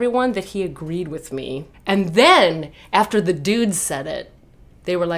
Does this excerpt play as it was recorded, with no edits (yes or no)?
no